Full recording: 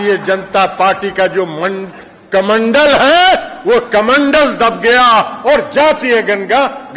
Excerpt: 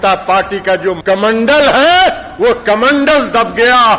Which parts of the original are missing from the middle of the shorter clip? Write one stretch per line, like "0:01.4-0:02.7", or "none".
0:01.5-0:02.3